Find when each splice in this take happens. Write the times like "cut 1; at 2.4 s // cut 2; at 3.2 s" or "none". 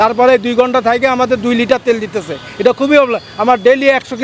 none